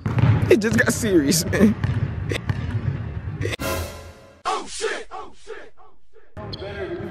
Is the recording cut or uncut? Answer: uncut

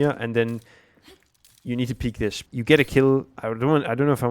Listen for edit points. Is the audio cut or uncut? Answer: cut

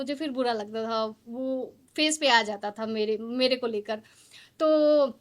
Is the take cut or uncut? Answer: uncut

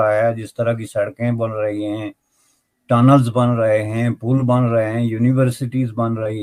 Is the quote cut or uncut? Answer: uncut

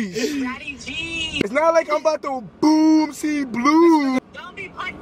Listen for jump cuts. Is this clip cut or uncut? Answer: cut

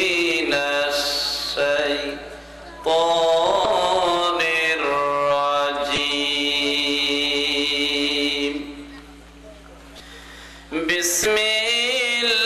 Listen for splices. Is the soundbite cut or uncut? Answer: cut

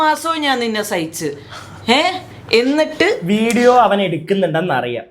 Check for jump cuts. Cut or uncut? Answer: cut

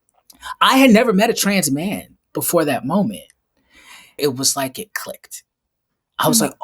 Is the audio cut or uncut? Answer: cut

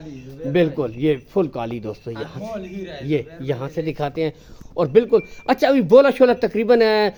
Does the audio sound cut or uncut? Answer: uncut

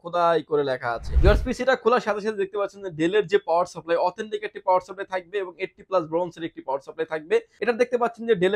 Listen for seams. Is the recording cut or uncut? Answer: cut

